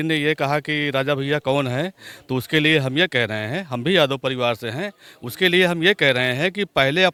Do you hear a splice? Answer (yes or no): no